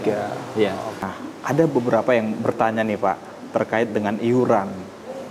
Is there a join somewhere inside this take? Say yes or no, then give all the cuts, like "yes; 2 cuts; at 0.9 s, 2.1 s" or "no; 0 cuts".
yes; 1 cut; at 1.0 s